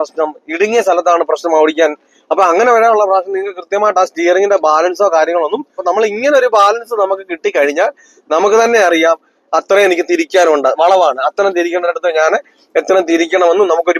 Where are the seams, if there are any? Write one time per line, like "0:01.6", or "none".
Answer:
0:05.8